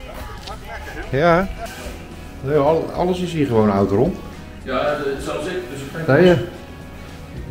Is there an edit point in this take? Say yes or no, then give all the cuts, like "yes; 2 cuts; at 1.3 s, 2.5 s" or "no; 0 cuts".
yes; 1 cut; at 1.6 s